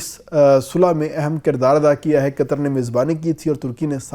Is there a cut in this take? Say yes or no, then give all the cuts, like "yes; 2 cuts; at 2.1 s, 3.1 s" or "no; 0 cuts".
no; 0 cuts